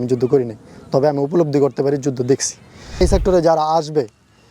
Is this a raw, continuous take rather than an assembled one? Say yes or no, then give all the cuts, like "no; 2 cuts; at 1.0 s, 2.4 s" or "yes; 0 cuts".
no; 1 cut; at 2.8 s